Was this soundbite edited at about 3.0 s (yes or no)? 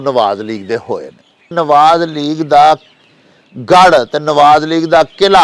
no